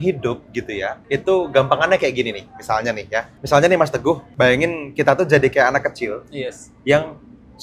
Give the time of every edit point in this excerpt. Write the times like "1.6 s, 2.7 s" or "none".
0.9 s, 3.3 s, 4.3 s